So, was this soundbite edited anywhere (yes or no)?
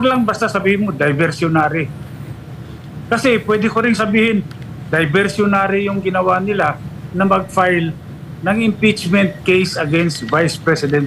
no